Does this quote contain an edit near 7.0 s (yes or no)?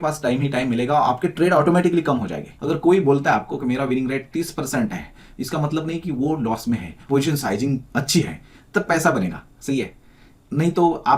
yes